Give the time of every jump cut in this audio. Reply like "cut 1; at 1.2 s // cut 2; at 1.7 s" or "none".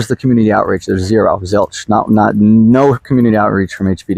none